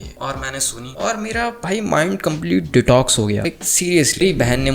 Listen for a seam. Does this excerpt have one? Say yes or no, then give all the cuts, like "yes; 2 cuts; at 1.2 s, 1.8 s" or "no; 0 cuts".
no; 0 cuts